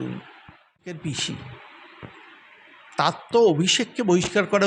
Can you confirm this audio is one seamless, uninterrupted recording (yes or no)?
no